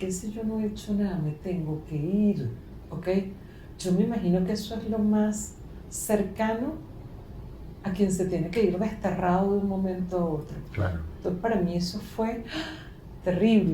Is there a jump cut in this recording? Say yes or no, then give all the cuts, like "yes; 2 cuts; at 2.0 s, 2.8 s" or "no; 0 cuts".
no; 0 cuts